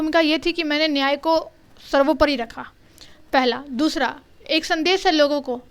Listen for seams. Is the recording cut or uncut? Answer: uncut